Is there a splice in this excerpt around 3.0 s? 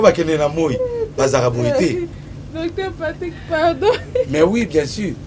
no; 0 cuts

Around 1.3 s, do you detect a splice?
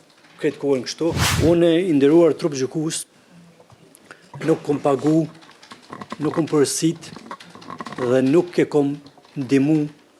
yes; 1 cut; at 1.3 s

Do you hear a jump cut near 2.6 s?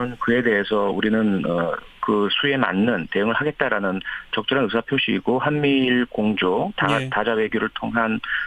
no; 0 cuts

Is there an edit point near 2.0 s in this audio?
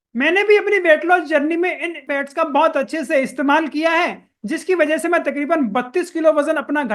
yes; 1 cut; at 2.0 s

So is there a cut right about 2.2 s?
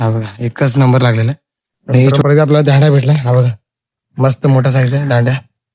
yes; 1 cut; at 2.2 s

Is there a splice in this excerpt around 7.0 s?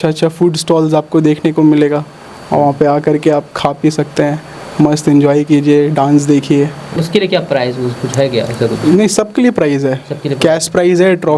yes; 1 cut; at 7.0 s

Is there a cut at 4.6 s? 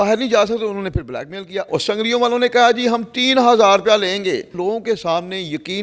yes; 2 cuts; at 1.7 s, 4.6 s

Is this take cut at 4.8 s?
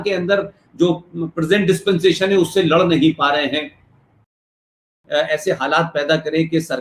yes; 1 cut; at 4.8 s

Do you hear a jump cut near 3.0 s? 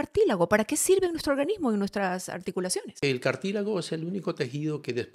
yes; 1 cut; at 3.0 s

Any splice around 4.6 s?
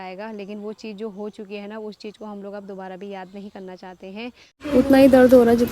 yes; 1 cut; at 4.6 s

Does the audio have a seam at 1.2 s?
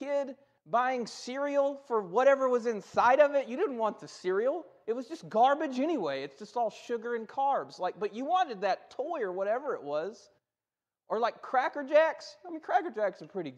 yes; 1 cut; at 1.2 s

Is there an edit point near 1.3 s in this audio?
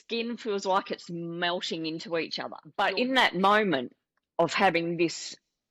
no; 1 cut; at 2.6 s

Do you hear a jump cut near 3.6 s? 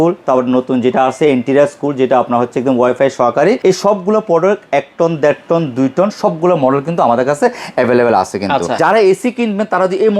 yes; 2 cuts; at 3.6 s, 8.8 s

